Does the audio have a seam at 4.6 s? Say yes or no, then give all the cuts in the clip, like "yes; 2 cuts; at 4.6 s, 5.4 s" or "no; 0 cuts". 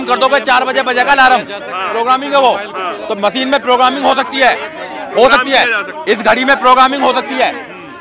no; 0 cuts